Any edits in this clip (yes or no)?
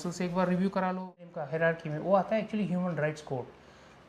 yes